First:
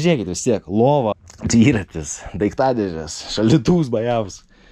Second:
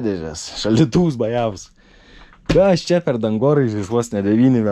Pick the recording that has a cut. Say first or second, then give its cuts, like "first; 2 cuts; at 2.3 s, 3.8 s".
first; 1 cut; at 1.3 s